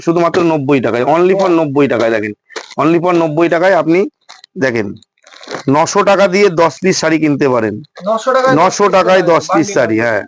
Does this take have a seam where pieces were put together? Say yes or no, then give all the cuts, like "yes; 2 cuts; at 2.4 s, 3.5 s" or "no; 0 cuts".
no; 0 cuts